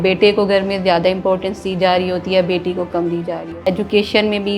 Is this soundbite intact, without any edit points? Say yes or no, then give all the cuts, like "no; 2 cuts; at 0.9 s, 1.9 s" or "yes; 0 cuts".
no; 1 cut; at 3.4 s